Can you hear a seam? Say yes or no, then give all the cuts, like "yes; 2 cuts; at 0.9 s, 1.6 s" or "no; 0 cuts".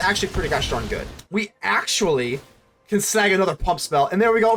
yes; 1 cut; at 1.2 s